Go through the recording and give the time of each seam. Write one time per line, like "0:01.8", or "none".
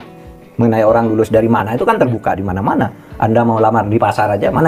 none